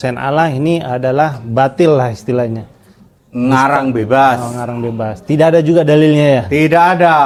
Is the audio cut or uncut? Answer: uncut